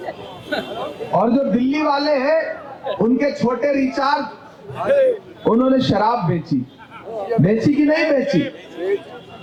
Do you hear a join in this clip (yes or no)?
no